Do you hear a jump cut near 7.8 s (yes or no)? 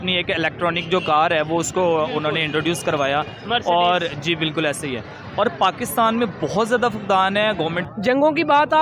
yes